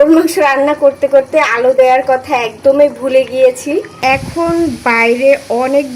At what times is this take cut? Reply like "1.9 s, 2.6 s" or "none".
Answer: 4.0 s